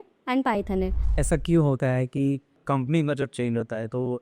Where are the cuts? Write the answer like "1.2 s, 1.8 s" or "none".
1.1 s